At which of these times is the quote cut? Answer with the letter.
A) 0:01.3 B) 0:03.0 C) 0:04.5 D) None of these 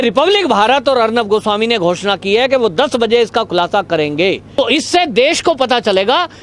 C